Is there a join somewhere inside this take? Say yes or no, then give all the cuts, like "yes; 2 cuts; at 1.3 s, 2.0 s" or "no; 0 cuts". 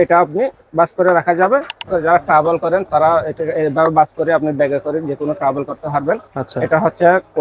yes; 1 cut; at 1.9 s